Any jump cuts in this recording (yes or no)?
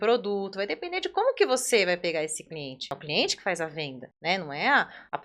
yes